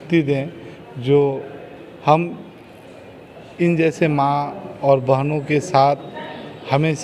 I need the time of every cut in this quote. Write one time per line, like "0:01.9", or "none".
none